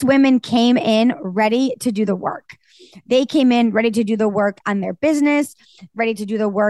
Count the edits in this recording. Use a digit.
0